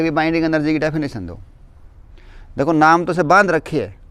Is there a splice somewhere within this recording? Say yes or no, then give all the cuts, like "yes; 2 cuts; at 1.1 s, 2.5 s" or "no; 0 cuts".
no; 0 cuts